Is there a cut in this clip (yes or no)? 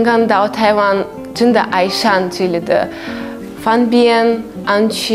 no